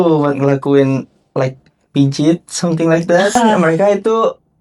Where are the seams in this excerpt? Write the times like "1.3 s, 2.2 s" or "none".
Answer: 3.4 s